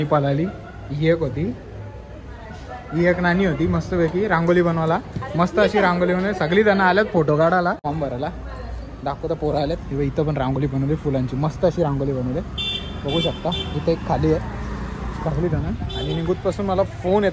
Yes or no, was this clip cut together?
yes